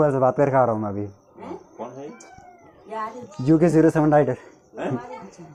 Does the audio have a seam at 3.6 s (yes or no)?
no